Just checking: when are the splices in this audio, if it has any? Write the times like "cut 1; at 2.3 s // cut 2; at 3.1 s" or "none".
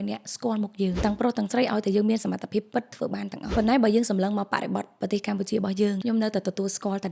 cut 1; at 1.0 s // cut 2; at 3.5 s // cut 3; at 6.0 s